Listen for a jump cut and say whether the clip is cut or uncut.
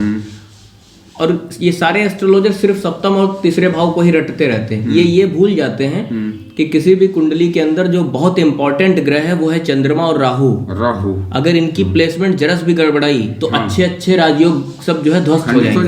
uncut